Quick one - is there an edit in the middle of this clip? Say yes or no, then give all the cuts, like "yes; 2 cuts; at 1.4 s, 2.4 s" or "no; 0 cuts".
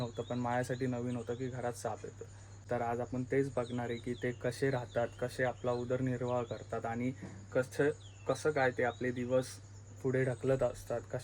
yes; 1 cut; at 2.6 s